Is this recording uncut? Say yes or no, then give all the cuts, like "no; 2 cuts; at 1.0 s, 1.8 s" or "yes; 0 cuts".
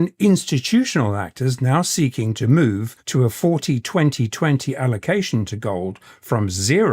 no; 1 cut; at 2.9 s